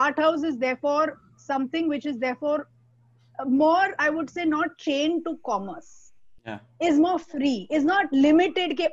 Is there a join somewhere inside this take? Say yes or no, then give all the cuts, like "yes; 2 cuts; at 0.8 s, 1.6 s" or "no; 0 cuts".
no; 0 cuts